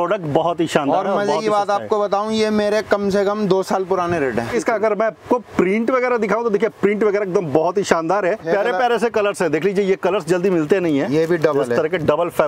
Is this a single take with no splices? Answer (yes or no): no